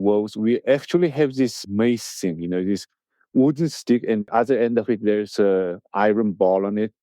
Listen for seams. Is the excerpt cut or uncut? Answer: cut